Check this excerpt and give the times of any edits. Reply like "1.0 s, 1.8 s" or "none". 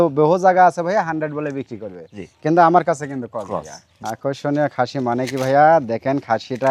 3.8 s